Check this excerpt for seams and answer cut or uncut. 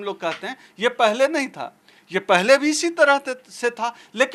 uncut